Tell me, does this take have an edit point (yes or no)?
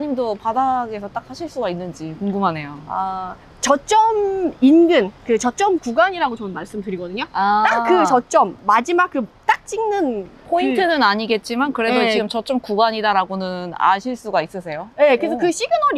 no